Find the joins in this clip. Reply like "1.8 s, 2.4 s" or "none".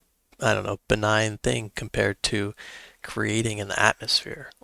none